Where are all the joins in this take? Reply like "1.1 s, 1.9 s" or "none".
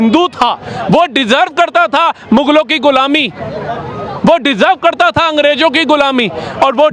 none